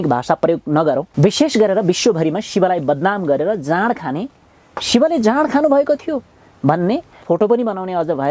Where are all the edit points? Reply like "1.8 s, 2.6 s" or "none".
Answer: 1.1 s, 7.2 s